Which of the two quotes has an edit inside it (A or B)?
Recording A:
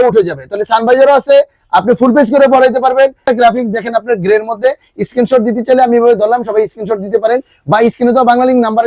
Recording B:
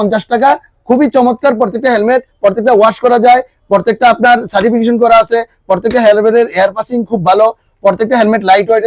A